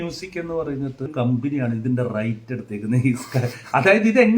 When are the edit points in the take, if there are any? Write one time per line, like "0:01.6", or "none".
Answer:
0:01.1